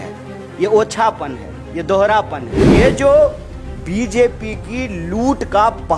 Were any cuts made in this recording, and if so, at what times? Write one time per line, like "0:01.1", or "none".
0:02.8

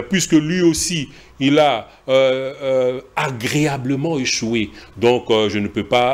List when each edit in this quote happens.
none

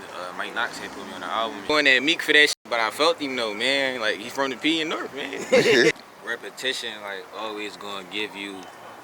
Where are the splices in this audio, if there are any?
0:01.7
0:05.9

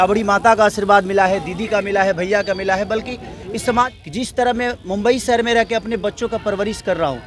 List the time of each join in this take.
0:03.9

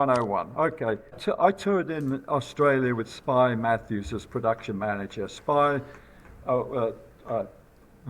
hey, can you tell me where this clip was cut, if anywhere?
0:01.2

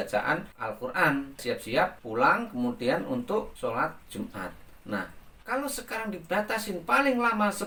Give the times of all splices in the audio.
none

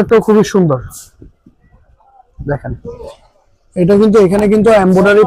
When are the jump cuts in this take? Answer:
none

